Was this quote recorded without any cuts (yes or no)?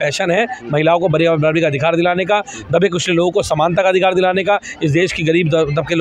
yes